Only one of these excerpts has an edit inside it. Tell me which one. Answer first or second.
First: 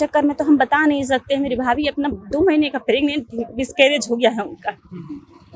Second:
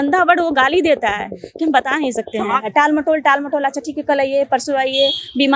second